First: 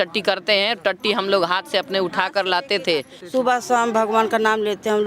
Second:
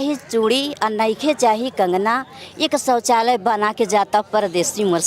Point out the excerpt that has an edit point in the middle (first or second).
first